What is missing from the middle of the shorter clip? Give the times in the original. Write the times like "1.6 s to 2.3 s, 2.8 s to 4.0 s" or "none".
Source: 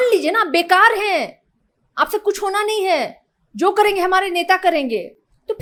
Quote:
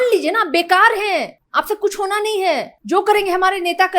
1.4 s to 1.8 s, 3.2 s to 3.4 s

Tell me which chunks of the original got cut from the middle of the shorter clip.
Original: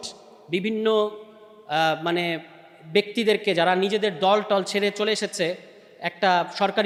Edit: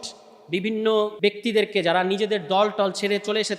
1.1 s to 2.9 s

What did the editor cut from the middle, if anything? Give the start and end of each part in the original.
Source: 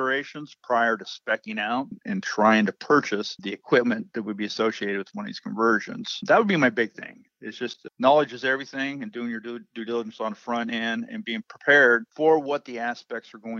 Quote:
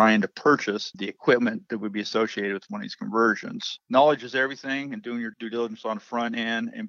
6.1 s to 7.7 s, 9.4 s to 9.7 s

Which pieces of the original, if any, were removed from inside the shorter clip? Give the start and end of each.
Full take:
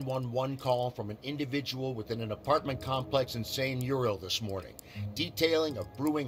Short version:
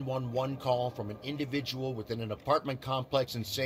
none

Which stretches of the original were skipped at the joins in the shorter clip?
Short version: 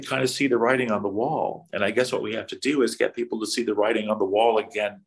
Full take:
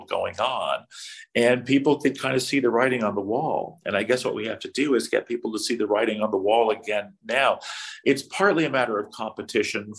none

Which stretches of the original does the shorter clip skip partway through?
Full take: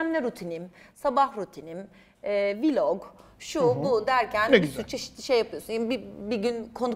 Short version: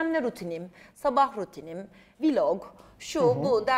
2.2 s to 2.6 s

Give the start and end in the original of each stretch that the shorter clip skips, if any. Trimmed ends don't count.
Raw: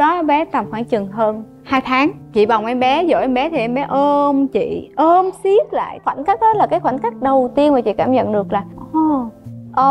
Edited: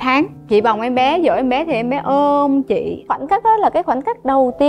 4.8 s to 5.9 s

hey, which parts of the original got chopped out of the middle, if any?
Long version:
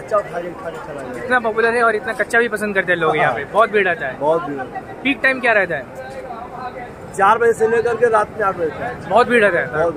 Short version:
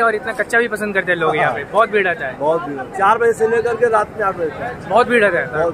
4.7 s to 7.1 s

